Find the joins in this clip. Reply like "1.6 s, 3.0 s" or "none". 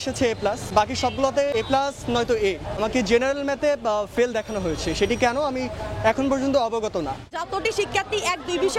0.7 s, 1.5 s, 2.7 s, 7.3 s